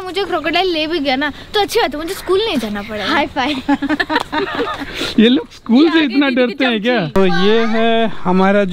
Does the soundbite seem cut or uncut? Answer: uncut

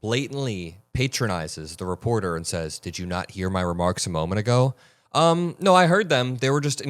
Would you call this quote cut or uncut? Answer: uncut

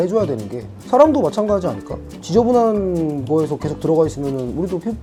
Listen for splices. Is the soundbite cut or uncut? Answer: uncut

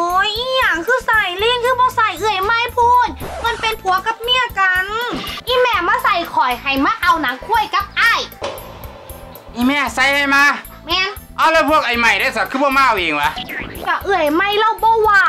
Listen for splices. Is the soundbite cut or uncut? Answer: cut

